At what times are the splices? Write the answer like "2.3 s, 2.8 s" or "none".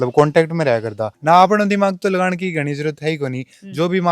1.0 s